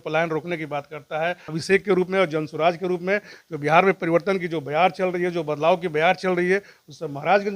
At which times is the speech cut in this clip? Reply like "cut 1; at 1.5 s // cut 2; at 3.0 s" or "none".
cut 1; at 1.5 s